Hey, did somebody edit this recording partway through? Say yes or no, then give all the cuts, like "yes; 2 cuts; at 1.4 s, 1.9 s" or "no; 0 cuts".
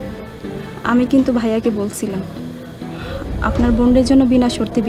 no; 0 cuts